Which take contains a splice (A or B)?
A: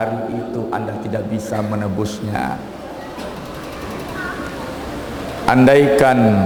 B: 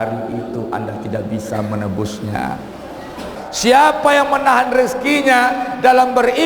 B